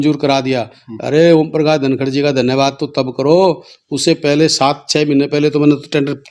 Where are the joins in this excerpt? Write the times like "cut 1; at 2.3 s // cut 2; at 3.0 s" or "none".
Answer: none